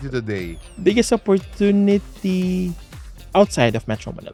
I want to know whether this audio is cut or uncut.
uncut